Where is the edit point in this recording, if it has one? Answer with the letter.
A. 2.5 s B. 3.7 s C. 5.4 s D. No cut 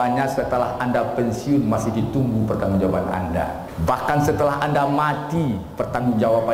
B